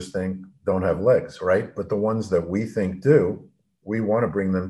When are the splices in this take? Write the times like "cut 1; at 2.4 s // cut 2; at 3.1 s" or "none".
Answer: none